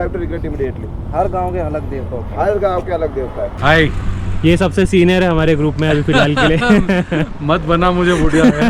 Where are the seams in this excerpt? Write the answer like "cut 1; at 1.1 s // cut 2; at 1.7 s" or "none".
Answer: cut 1; at 3.6 s